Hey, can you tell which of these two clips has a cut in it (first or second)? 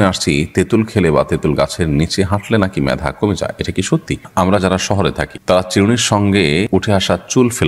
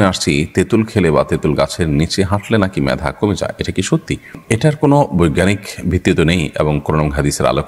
first